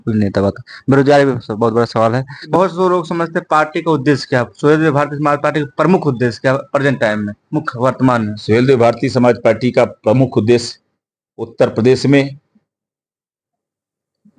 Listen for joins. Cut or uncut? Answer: cut